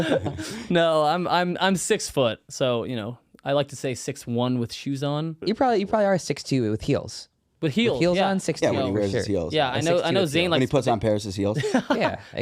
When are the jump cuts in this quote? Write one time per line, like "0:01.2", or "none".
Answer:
0:05.4